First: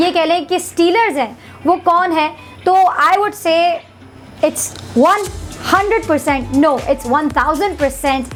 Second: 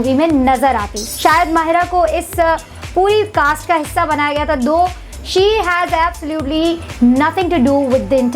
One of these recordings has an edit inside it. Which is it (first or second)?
second